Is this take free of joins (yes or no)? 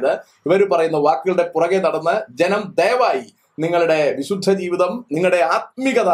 yes